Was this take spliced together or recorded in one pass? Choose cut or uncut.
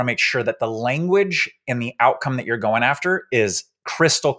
uncut